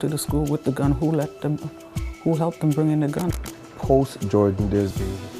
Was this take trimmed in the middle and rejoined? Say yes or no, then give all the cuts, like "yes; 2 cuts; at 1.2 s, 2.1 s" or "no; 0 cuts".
yes; 1 cut; at 3.5 s